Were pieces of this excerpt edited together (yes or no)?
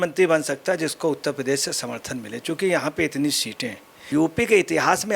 yes